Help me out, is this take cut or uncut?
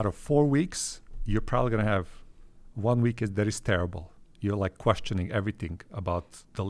uncut